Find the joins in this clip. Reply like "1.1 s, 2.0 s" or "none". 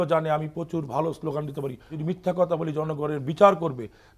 1.9 s